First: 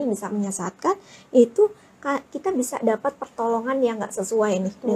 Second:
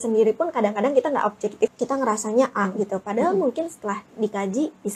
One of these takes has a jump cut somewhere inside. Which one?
second; 1 cut; at 1.7 s

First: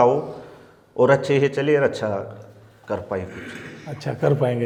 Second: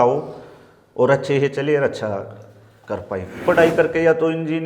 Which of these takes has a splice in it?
second; 1 cut; at 3.4 s

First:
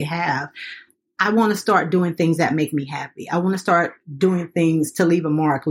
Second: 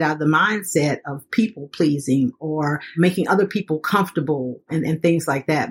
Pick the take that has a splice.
second; 2 cuts; at 2.9 s, 4.7 s

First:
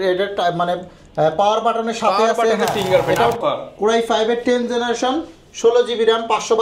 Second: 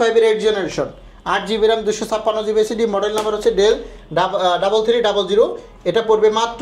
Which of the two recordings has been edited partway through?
first; 1 cut; at 3.4 s

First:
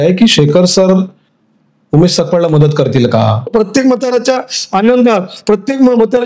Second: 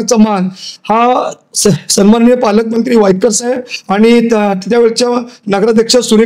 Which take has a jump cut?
first; 1 cut; at 3.4 s

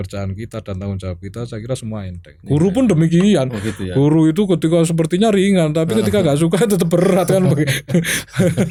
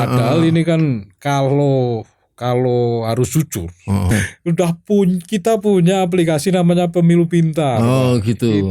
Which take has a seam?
second; 1 cut; at 4.1 s

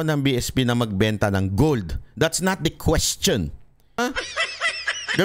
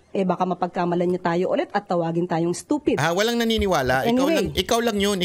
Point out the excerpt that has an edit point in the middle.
first; 1 cut; at 4.0 s

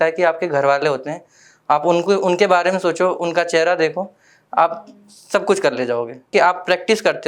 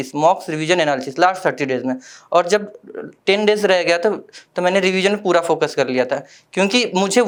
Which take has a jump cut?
first; 1 cut; at 6.3 s

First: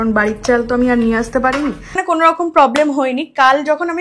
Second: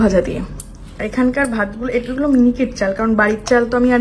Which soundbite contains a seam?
first; 1 cut; at 2.0 s

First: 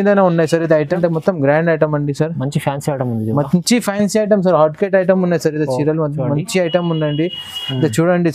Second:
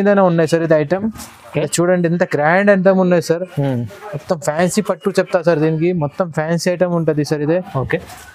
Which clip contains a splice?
first; 1 cut; at 1.0 s

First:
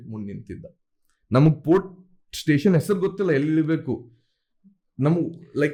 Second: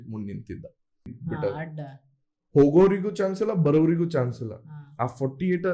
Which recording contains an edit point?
second; 1 cut; at 1.2 s

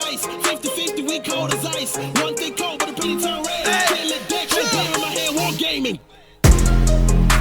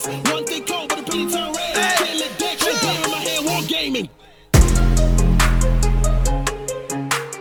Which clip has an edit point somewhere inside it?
first; 1 cut; at 1.0 s

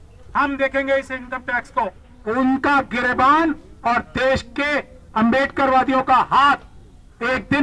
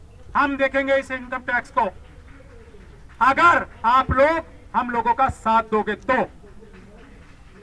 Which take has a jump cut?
first; 1 cut; at 2.1 s

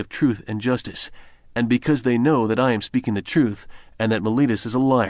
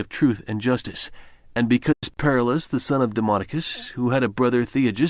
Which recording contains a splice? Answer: first; 1 cut; at 1.9 s

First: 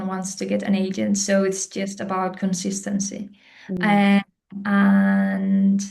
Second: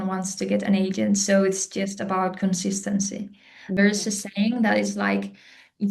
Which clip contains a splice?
second; 1 cut; at 3.8 s

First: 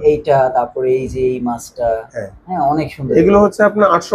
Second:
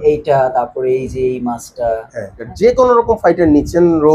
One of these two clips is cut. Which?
second; 1 cut; at 2.4 s

